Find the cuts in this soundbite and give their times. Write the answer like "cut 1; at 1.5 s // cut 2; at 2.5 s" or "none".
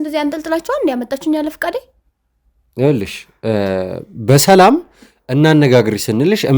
none